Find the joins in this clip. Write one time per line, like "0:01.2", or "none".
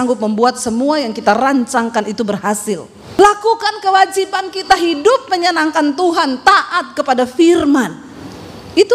0:03.0